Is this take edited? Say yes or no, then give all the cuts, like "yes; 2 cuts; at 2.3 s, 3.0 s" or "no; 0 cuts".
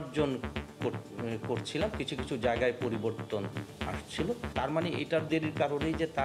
no; 0 cuts